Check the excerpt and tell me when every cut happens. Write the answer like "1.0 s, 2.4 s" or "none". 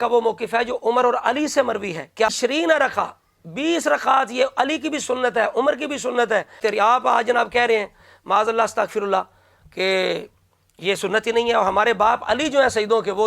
2.3 s, 6.6 s